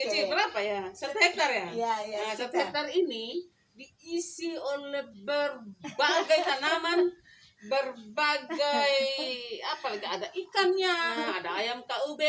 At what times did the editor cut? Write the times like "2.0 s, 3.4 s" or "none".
11.1 s